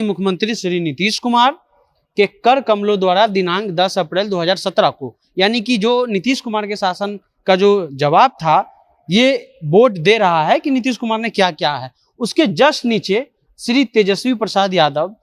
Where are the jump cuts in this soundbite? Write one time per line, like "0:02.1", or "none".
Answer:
none

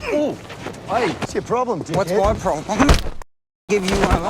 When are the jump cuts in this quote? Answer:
0:01.2

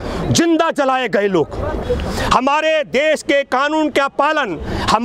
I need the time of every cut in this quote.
0:01.8

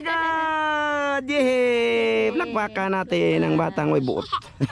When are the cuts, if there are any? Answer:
none

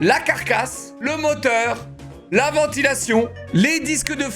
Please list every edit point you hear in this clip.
0:01.1
0:03.4

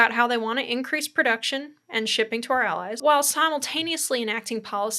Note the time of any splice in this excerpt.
0:03.0

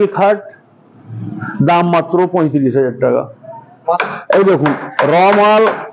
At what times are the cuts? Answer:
0:04.0

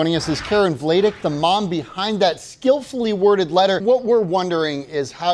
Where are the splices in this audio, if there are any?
0:03.8

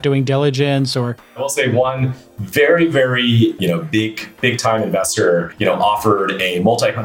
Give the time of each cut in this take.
0:01.5
0:03.6
0:05.5

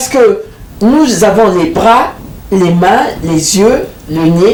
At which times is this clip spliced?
none

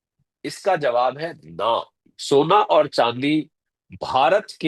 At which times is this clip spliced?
0:02.1

